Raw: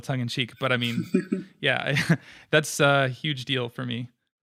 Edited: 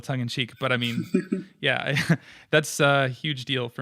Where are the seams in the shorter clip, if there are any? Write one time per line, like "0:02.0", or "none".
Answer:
none